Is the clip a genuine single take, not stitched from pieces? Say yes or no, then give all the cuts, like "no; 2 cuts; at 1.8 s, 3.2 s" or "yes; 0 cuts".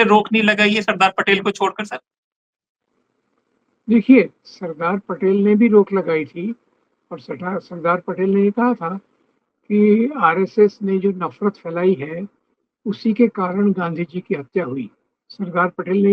yes; 0 cuts